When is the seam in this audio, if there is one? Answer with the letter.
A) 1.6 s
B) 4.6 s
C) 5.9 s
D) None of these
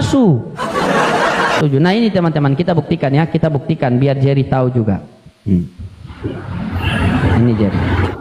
A